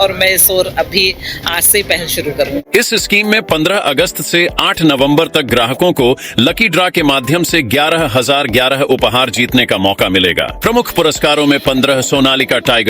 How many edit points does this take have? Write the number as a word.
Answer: two